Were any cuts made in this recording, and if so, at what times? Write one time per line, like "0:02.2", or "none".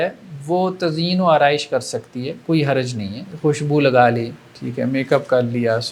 0:03.2